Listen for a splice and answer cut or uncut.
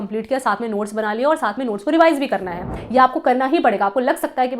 cut